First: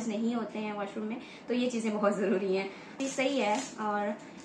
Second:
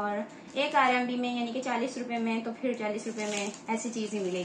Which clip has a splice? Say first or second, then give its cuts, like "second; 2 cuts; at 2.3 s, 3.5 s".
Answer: first; 2 cuts; at 1.1 s, 3.0 s